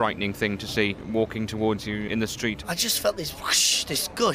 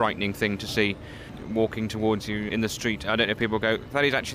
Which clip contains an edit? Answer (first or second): first